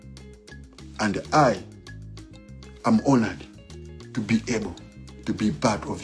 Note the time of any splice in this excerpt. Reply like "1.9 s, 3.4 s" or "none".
0.9 s